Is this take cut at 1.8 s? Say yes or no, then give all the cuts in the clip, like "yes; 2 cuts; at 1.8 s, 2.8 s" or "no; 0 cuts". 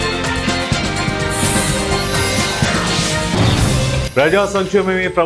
no; 1 cut; at 3.8 s